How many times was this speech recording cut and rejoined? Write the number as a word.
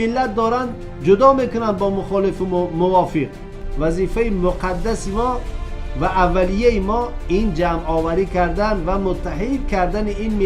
one